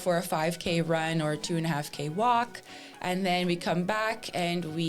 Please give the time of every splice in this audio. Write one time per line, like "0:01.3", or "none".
none

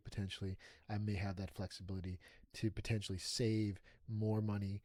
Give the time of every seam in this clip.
none

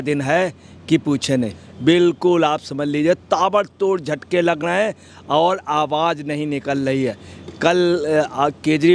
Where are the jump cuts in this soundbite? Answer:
0:01.6

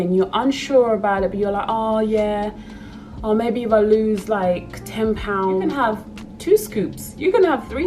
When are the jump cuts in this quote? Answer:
0:05.7

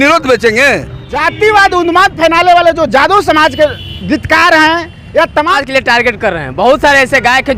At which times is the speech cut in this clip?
0:01.2
0:05.6

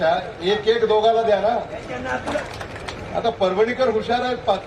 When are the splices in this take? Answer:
0:02.4

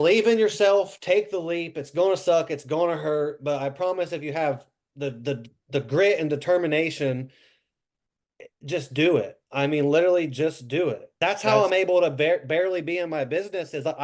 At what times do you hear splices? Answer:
0:11.4

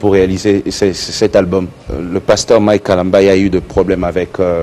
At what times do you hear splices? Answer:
0:01.9

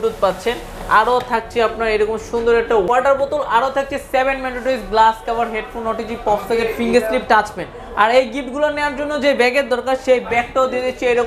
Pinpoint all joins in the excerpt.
0:02.9

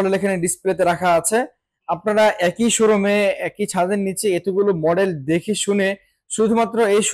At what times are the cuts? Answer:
none

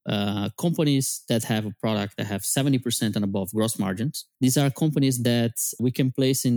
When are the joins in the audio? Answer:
0:04.2
0:05.8

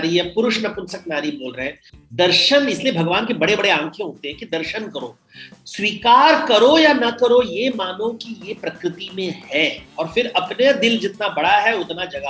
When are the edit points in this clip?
0:01.9

